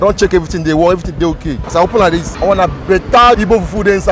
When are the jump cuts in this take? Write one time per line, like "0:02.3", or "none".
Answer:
0:01.5
0:02.3

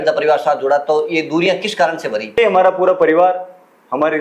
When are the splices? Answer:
0:02.4

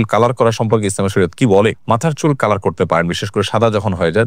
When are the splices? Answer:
none

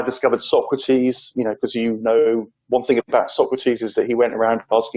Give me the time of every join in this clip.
none

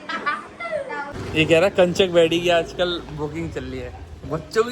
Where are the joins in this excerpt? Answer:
0:01.2

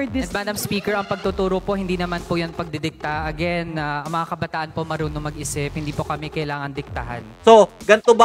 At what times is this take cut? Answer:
0:07.4

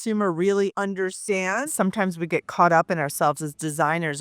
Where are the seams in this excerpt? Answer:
0:01.7

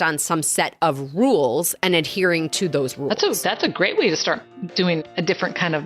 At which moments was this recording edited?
0:04.9

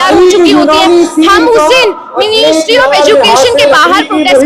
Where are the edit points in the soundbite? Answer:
none

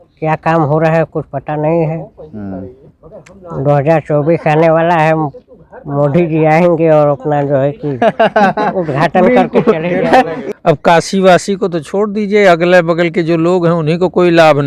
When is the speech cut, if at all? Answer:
0:10.4

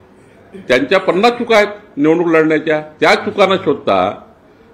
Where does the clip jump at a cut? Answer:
none

